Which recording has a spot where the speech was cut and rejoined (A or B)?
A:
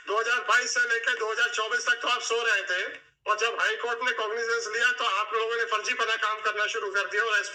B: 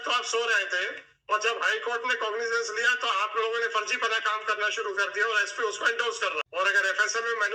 B